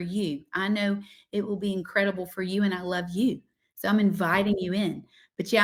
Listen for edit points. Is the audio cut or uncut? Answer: uncut